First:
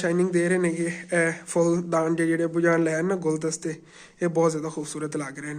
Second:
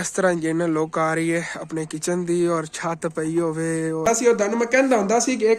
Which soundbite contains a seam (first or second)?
second